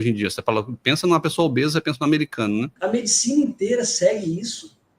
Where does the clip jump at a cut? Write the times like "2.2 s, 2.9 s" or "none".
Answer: 2.7 s